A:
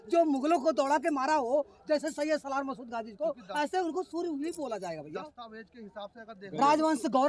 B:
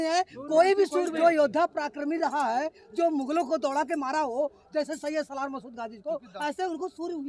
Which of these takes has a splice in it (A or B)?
B